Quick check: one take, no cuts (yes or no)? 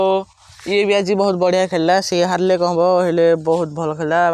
yes